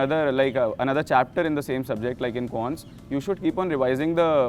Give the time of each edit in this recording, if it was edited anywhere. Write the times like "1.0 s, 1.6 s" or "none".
none